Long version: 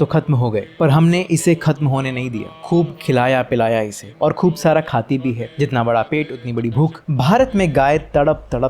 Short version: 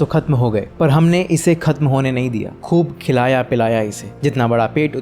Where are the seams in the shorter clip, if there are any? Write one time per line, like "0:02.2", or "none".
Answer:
0:04.1